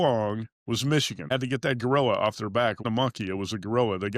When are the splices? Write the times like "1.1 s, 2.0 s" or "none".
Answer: 1.3 s, 2.8 s